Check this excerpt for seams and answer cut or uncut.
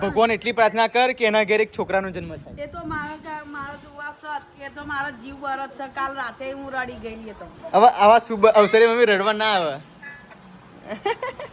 cut